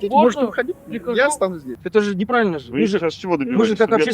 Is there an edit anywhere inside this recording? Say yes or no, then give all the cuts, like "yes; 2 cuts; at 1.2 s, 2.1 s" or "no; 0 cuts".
yes; 1 cut; at 1.7 s